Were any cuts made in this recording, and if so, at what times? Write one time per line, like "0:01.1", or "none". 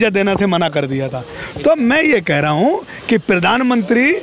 none